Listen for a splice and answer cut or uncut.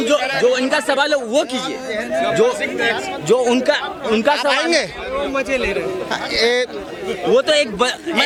uncut